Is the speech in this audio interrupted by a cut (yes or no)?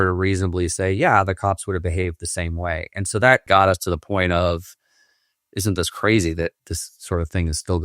yes